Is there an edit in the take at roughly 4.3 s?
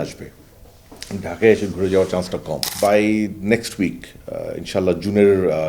no; 1 cut; at 2.6 s

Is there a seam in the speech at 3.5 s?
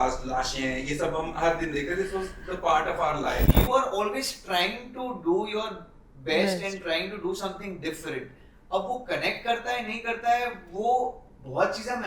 yes; 1 cut; at 3.5 s

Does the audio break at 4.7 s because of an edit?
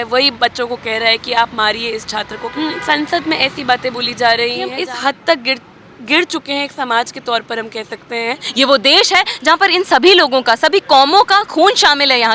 yes; 3 cuts; at 2.5 s, 4.7 s, 8.4 s

